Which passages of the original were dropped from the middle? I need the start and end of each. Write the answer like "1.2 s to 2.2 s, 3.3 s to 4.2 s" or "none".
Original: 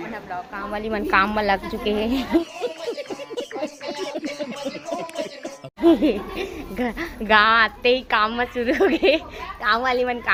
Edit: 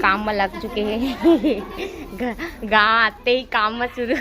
2.3 s to 5.8 s